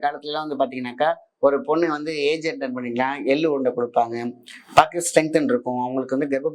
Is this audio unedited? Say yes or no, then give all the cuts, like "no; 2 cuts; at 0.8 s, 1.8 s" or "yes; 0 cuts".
yes; 0 cuts